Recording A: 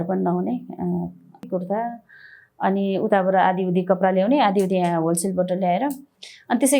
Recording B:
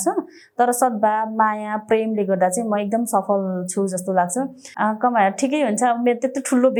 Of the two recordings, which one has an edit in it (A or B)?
A